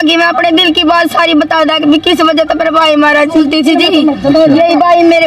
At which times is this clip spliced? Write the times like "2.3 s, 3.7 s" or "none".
3.4 s